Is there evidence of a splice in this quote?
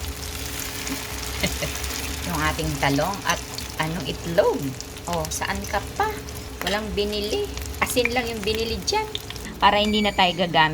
yes; 5 cuts; at 2.1 s, 4.0 s, 6.4 s, 7.6 s, 9.4 s

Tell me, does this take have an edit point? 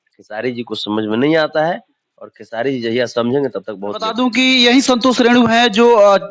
yes; 1 cut; at 4.0 s

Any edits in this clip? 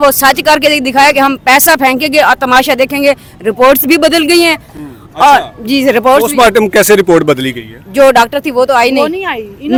no; 0 cuts

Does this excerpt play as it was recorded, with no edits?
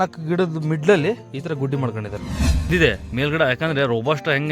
no; 1 cut; at 2.7 s

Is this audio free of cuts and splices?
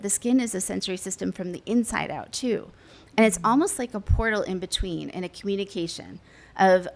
yes; 0 cuts

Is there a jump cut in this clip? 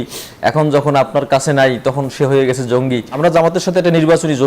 yes; 1 cut; at 3.1 s

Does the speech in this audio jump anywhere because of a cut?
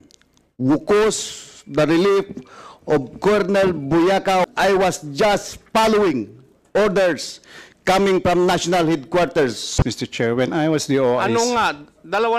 yes; 2 cuts; at 4.5 s, 9.8 s

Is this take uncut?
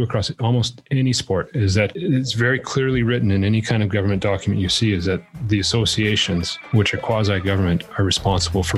yes; 0 cuts

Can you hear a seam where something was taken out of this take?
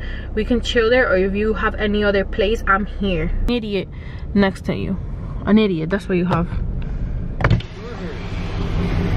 yes; 1 cut; at 3.4 s

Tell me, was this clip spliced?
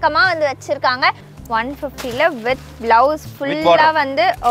yes; 1 cut; at 1.3 s

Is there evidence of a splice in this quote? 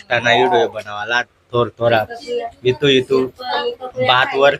no; 0 cuts

